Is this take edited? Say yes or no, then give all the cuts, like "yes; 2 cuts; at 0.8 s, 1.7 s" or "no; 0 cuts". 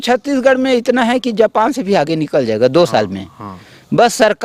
no; 0 cuts